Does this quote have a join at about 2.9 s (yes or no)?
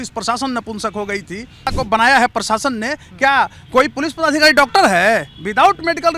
no